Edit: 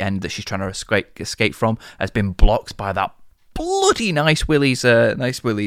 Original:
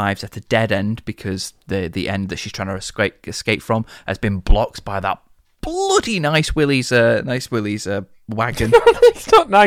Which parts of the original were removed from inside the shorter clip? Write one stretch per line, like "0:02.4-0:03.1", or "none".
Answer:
none